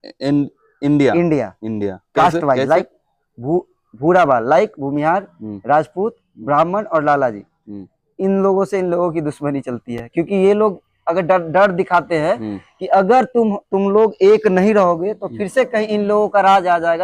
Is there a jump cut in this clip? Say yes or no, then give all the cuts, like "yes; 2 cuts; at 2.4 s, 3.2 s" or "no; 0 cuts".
no; 0 cuts